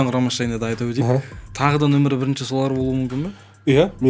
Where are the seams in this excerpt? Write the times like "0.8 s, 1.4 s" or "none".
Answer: 1.4 s